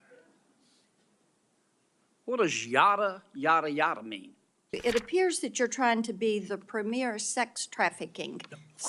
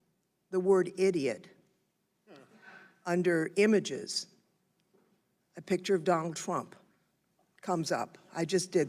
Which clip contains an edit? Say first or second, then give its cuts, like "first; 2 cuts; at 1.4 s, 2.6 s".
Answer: first; 1 cut; at 4.9 s